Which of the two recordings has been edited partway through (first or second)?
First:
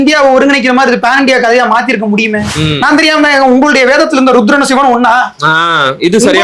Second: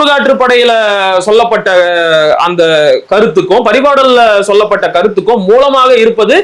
first